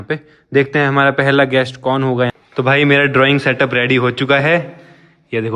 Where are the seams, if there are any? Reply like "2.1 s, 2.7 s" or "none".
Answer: 2.4 s